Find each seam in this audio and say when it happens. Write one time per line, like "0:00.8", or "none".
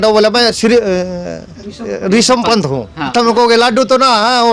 0:03.1